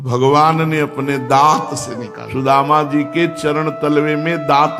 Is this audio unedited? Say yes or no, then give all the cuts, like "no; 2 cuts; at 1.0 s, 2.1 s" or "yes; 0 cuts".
yes; 0 cuts